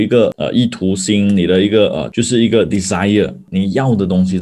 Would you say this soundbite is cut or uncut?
cut